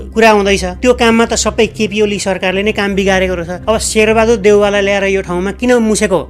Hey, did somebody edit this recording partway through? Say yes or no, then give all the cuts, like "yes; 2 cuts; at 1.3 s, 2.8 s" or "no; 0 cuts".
no; 0 cuts